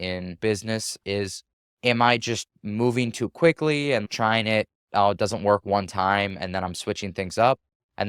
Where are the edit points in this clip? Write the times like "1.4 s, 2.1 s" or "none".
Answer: 1.0 s